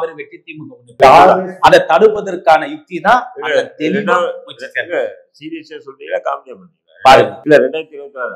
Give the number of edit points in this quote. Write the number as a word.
one